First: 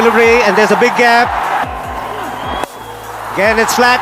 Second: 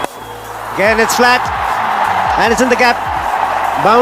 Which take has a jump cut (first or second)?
first